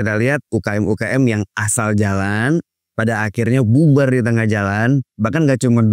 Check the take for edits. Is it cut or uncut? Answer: uncut